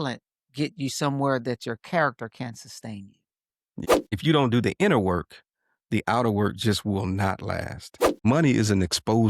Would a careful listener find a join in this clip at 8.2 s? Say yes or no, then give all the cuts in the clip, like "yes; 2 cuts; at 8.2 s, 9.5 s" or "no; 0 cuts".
yes; 2 cuts; at 4.1 s, 8.2 s